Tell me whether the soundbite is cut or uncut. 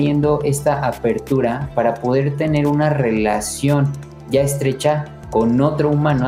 uncut